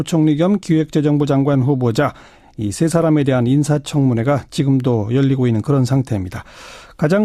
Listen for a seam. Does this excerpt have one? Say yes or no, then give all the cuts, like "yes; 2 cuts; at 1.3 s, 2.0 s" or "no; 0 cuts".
no; 0 cuts